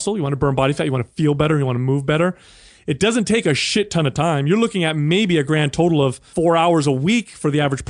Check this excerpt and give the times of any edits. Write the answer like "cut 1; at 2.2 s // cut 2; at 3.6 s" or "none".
cut 1; at 6.3 s

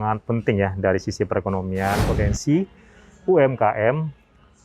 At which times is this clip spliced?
cut 1; at 2.1 s

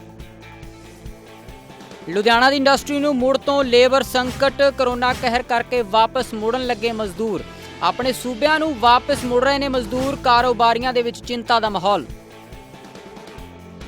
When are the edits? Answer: cut 1; at 1.8 s

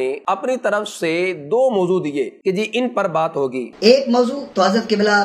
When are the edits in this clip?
cut 1; at 3.7 s

